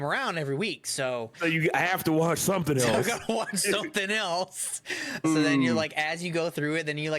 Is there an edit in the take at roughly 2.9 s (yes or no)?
no